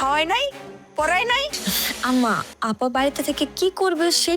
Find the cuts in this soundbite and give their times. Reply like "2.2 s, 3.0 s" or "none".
1.6 s, 2.5 s